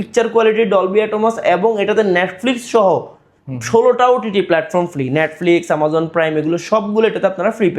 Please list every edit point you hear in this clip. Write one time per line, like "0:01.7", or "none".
none